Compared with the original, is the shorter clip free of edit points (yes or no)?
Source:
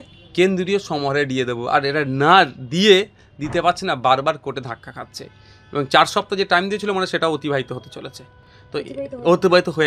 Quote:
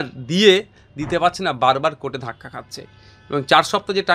yes